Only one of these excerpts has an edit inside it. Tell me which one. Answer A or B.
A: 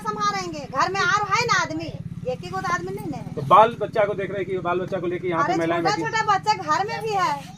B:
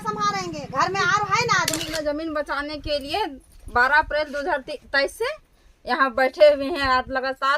B